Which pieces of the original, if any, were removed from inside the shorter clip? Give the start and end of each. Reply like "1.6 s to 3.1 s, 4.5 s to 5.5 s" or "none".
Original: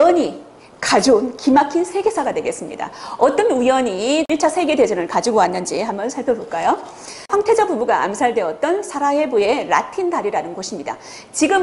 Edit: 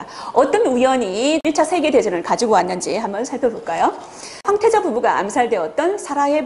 none